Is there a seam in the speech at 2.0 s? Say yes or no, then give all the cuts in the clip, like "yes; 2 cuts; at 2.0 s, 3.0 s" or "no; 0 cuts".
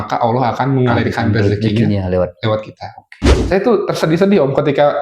no; 1 cut; at 3.3 s